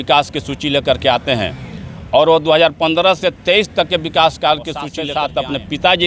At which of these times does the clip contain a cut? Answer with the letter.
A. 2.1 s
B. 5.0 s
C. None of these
B